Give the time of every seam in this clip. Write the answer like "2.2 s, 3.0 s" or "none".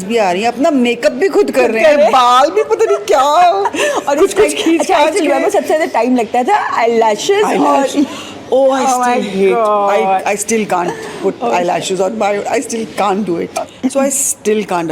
none